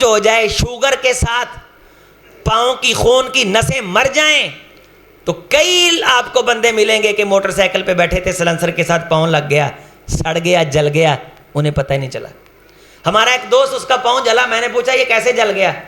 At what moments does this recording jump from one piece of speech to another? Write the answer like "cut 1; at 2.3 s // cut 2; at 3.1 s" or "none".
none